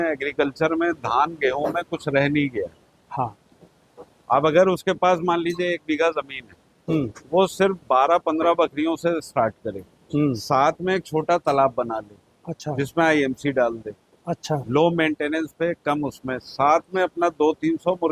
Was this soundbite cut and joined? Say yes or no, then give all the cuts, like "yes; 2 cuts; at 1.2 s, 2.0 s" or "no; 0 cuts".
no; 0 cuts